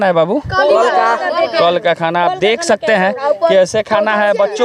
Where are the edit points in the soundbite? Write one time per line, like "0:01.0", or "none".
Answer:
none